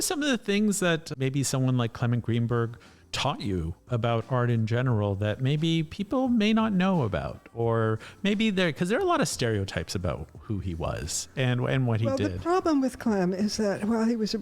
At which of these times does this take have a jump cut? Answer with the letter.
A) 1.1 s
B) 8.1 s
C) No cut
A